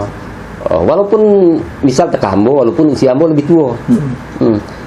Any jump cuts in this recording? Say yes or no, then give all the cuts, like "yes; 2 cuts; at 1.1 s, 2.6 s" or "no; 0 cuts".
no; 0 cuts